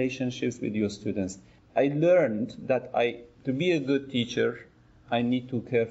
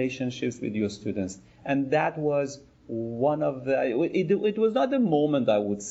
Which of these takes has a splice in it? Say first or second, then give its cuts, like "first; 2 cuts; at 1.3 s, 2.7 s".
first; 1 cut; at 1.5 s